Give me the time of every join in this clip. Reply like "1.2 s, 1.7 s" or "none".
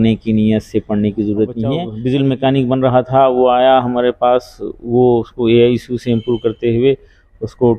1.9 s